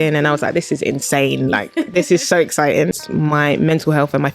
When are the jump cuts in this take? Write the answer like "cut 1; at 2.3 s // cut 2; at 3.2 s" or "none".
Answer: cut 1; at 3.0 s